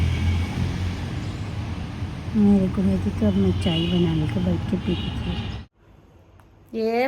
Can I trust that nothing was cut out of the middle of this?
no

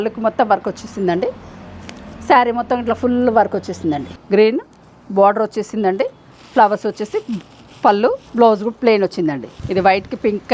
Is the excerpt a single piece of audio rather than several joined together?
no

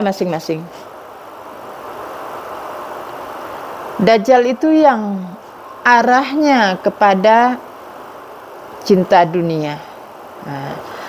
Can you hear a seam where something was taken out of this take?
no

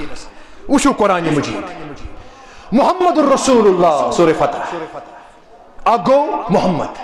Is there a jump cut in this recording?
no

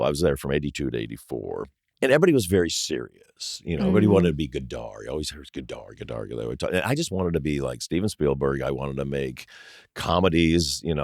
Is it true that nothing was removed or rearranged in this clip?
no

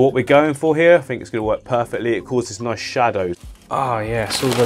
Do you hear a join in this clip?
yes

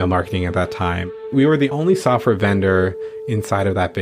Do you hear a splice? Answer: yes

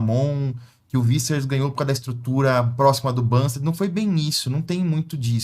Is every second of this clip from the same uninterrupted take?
yes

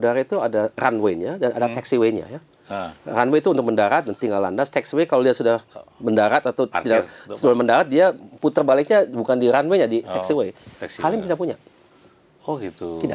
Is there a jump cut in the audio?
no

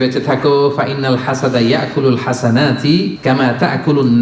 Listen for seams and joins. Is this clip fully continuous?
no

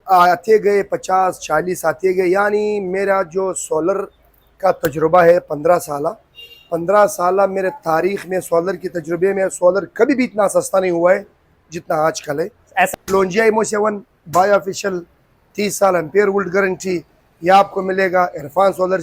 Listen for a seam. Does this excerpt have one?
yes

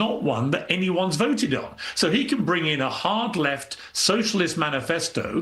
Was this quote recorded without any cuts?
no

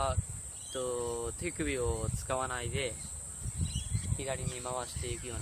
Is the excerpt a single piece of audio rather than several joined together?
no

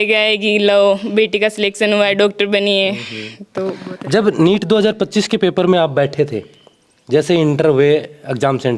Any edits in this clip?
no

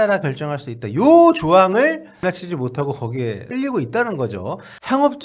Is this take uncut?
no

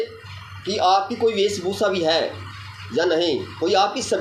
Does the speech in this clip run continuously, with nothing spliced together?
yes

